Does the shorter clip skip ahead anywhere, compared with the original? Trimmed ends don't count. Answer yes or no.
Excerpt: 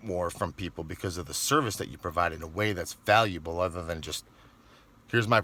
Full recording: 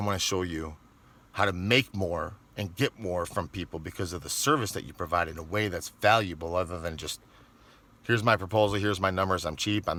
no